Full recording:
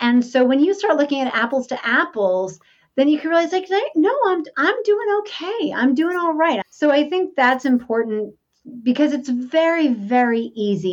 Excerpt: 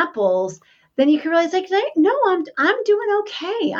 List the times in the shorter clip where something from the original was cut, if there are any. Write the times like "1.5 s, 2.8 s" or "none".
none